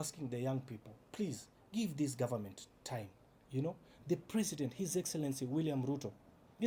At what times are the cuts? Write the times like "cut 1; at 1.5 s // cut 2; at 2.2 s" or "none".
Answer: none